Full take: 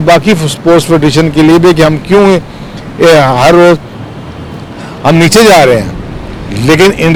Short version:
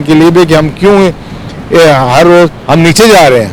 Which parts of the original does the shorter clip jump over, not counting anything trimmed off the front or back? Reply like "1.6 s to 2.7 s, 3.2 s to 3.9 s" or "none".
3.9 s to 4.9 s